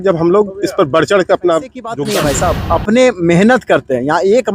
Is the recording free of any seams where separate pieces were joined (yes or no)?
no